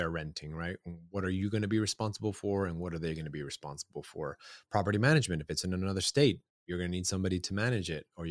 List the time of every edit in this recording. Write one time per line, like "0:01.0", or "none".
none